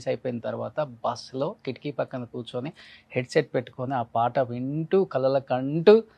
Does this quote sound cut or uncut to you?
uncut